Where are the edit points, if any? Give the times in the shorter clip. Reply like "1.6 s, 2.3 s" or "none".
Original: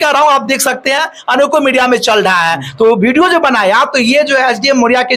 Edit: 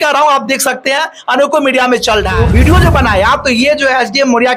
2.4 s